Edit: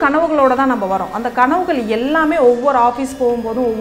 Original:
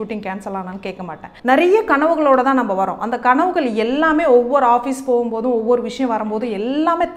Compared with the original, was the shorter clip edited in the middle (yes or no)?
no